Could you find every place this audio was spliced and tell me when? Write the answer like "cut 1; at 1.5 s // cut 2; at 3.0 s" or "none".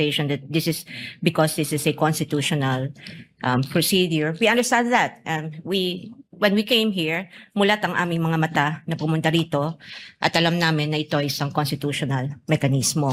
none